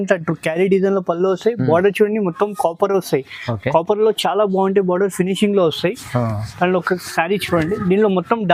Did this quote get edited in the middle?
no; 0 cuts

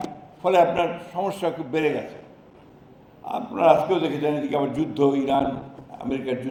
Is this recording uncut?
yes; 0 cuts

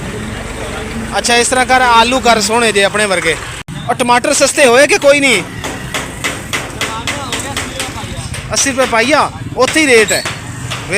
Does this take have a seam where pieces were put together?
yes; 1 cut; at 4.2 s

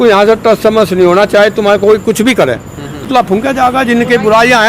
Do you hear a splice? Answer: yes; 1 cut; at 3.0 s

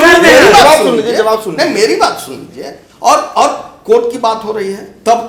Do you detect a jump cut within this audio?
no; 0 cuts

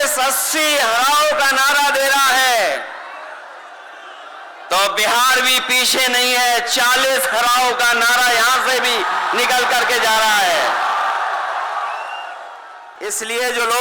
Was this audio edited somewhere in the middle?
yes; 1 cut; at 12.8 s

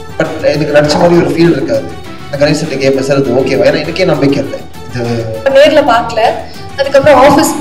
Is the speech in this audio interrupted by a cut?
yes; 1 cut; at 5.4 s

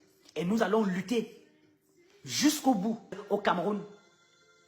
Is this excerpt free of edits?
no; 1 cut; at 3.2 s

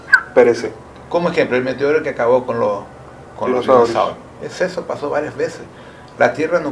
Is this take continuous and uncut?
yes; 0 cuts

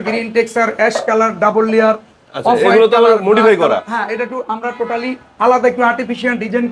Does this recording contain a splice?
no; 0 cuts

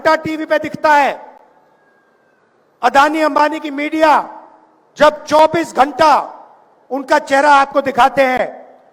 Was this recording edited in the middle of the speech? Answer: no; 0 cuts

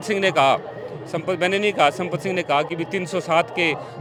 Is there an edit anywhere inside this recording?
no; 0 cuts

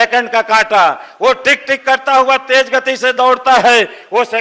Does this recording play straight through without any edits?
yes; 0 cuts

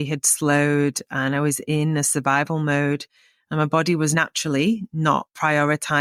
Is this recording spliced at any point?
no; 0 cuts

